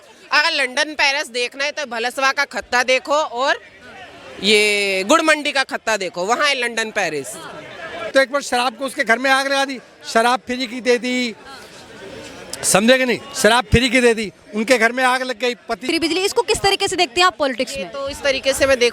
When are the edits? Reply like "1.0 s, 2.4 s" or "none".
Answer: 8.1 s, 15.9 s